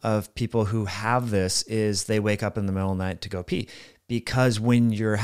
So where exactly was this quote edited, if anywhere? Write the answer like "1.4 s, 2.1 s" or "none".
none